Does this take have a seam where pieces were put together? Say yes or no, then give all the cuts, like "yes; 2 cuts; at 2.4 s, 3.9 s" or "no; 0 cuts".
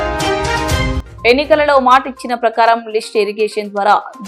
yes; 1 cut; at 0.9 s